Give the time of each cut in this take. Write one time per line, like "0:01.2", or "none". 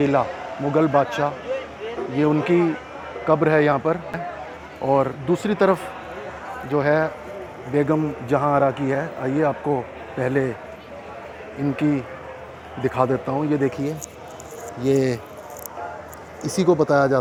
none